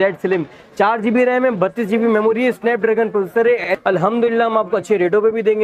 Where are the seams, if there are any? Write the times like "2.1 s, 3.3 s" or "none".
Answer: 3.6 s